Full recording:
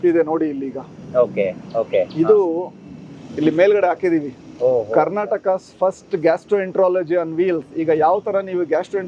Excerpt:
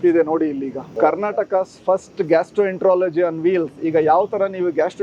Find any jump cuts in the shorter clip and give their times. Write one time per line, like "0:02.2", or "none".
0:00.9